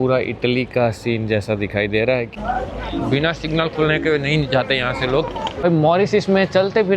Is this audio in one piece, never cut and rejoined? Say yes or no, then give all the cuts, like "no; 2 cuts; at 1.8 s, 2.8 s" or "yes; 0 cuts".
no; 2 cuts; at 2.3 s, 5.6 s